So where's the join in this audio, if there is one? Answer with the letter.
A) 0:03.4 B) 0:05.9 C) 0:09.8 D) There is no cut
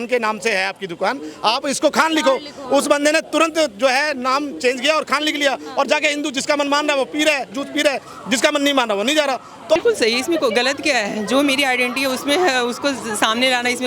C